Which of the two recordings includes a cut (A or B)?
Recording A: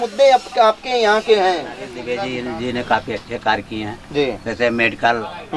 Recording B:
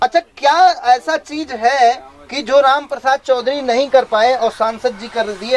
A